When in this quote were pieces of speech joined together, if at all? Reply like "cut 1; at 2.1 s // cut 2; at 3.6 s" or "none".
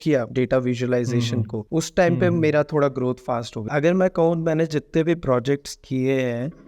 cut 1; at 3.6 s